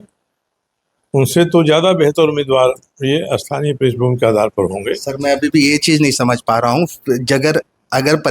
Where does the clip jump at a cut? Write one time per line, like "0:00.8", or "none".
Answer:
none

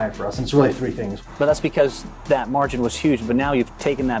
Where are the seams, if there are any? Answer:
0:01.1

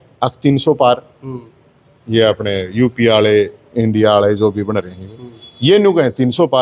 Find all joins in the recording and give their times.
none

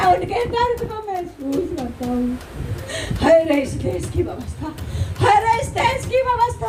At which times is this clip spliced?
none

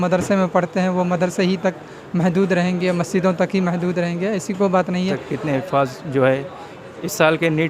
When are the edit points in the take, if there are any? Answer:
0:05.3

